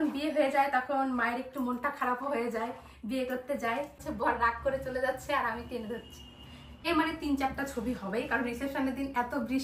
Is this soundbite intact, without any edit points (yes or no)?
no